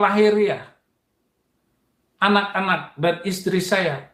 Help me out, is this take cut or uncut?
uncut